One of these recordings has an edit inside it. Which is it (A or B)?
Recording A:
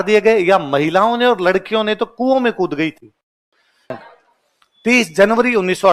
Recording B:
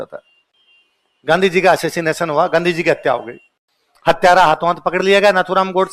A